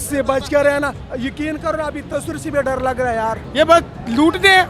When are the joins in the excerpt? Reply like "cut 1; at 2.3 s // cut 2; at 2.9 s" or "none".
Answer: cut 1; at 1.0 s // cut 2; at 3.4 s